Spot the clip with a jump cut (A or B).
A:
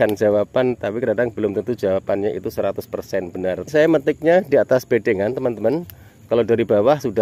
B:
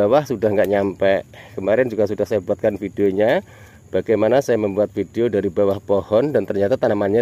A